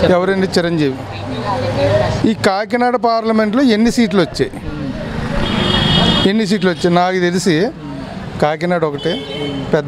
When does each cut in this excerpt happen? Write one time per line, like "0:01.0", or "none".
none